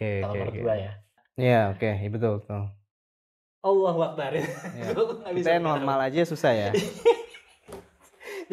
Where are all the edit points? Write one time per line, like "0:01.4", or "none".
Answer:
0:01.3